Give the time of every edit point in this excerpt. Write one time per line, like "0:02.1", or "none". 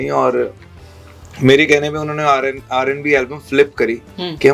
none